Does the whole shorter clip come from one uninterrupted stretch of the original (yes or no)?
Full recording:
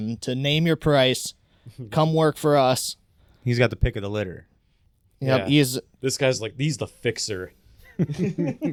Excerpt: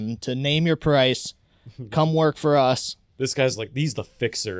no